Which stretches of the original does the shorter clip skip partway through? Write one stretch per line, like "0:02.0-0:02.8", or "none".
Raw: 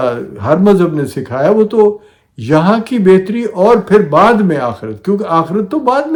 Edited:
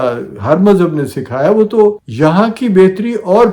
0:02.1-0:02.4